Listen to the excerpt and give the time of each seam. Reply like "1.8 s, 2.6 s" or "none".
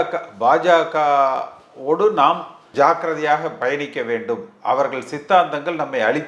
2.6 s